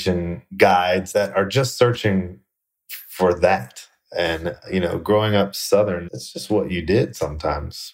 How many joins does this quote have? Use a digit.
0